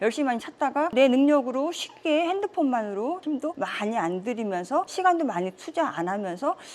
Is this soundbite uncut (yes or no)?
yes